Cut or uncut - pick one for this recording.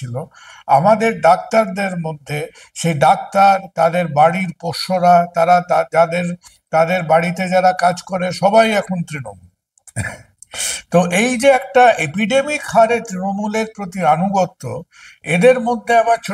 uncut